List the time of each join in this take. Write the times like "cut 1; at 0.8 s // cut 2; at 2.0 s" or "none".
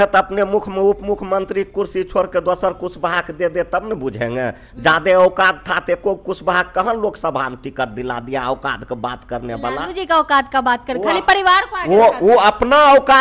none